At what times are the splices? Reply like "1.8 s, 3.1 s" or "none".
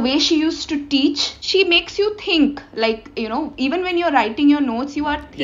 1.3 s